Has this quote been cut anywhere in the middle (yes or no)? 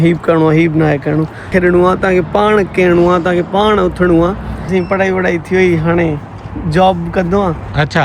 yes